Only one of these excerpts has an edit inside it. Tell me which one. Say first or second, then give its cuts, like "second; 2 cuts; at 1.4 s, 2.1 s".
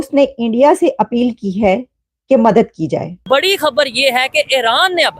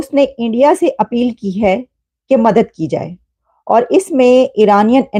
first; 1 cut; at 3.2 s